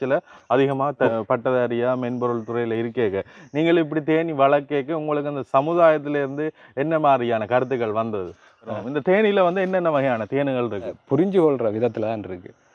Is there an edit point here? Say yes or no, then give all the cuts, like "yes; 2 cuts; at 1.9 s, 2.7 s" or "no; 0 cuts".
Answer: yes; 3 cuts; at 1.1 s, 8.7 s, 11.0 s